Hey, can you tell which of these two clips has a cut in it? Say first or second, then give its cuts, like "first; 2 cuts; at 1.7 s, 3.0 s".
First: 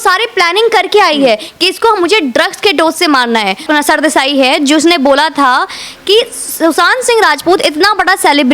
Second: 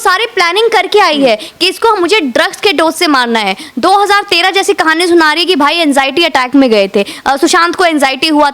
first; 1 cut; at 3.6 s